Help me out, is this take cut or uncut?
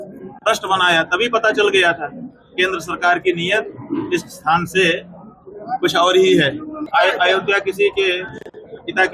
cut